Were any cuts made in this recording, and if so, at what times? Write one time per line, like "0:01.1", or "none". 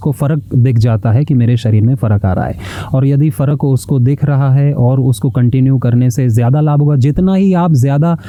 none